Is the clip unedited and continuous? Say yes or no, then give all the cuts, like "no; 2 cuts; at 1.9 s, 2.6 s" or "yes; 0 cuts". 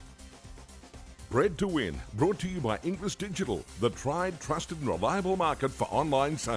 no; 1 cut; at 1.3 s